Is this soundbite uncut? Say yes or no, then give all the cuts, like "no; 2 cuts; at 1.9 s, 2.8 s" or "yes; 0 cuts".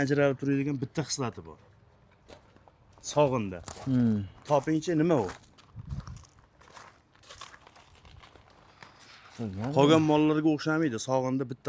yes; 0 cuts